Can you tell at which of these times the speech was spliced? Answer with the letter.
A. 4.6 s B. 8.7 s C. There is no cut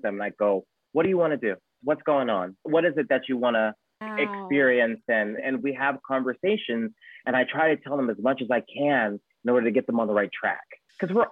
C